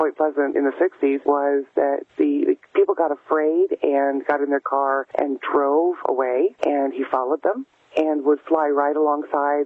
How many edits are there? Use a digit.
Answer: 4